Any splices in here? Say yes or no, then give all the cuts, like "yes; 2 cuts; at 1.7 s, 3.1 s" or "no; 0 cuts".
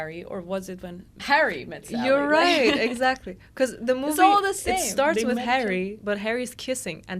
yes; 2 cuts; at 1.2 s, 6.0 s